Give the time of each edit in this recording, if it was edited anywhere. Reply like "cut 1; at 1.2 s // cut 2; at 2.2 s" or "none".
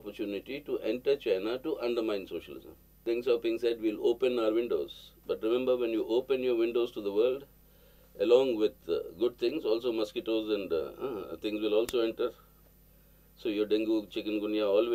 cut 1; at 3.0 s